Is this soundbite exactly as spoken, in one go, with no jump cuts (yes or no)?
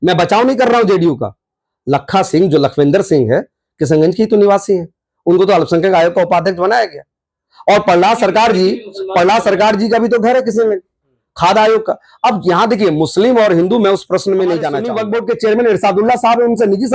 no